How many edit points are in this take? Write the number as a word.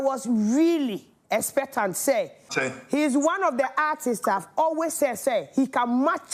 one